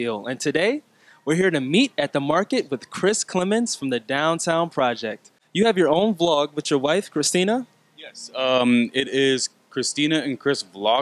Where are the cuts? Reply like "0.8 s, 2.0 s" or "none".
5.4 s